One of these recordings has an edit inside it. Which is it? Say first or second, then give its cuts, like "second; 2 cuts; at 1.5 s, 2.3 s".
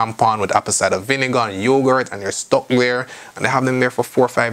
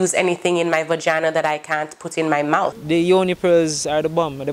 second; 1 cut; at 2.7 s